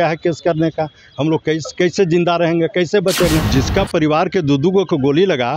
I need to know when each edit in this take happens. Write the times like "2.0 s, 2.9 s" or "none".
3.5 s